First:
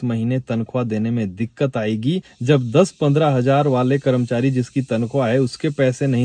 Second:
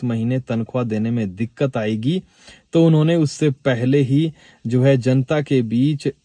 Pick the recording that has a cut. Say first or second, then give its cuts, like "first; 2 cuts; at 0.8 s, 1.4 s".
first; 1 cut; at 2.3 s